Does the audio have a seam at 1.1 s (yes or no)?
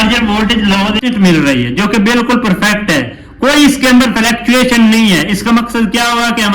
yes